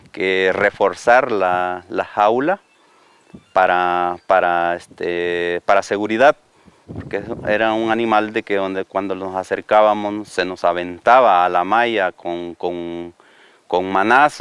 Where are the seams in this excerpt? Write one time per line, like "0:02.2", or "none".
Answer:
0:08.2